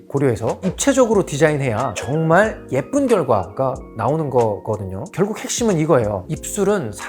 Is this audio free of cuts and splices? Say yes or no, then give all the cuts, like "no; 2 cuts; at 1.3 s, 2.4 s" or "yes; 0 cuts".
no; 1 cut; at 5.1 s